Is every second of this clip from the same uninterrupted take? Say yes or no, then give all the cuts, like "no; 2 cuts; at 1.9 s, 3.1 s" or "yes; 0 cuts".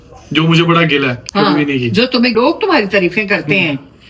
no; 1 cut; at 2.3 s